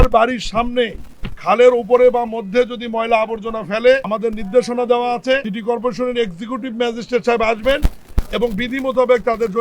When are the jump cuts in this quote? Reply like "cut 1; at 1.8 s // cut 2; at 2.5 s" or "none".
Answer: cut 1; at 4.1 s // cut 2; at 5.5 s